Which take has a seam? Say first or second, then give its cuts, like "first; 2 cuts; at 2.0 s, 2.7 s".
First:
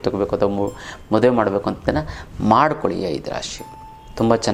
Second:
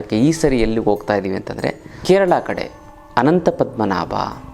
second; 1 cut; at 2.0 s